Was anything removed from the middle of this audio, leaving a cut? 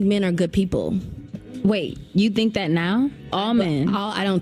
no; 0 cuts

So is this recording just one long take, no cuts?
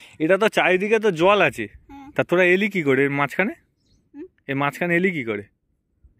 yes; 0 cuts

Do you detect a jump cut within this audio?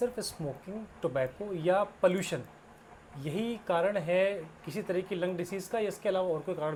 no; 0 cuts

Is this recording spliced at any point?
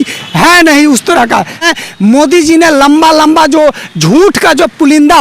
yes; 1 cut; at 1.6 s

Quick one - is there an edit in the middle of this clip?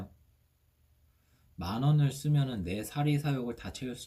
no; 0 cuts

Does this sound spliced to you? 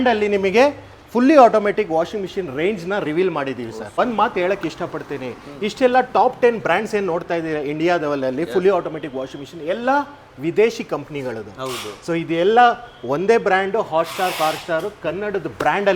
no; 0 cuts

